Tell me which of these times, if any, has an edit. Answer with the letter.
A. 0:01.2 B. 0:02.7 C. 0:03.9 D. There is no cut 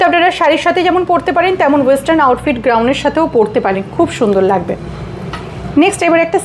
D